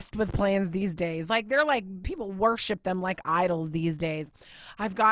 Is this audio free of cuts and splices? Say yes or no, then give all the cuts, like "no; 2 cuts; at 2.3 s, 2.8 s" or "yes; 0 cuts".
no; 1 cut; at 1.2 s